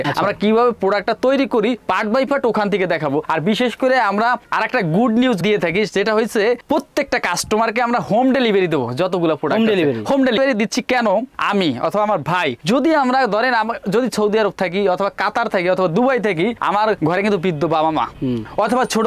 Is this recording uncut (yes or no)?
yes